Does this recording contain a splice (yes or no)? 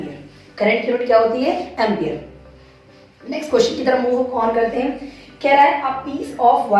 no